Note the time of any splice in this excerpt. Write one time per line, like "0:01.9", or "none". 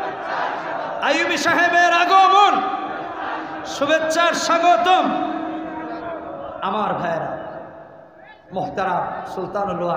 none

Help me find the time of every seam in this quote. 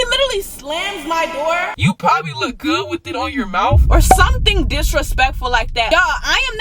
0:01.7

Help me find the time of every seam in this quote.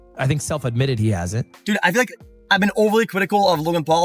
0:01.5

